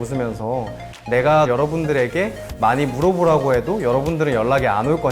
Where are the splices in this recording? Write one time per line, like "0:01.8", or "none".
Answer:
none

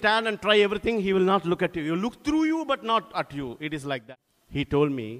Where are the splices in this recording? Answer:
0:04.0

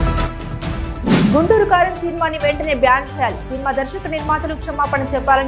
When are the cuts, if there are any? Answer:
0:01.1

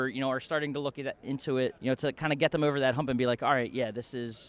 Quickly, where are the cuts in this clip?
0:01.8

